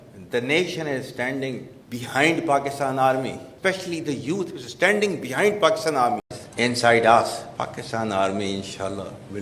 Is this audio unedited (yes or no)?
no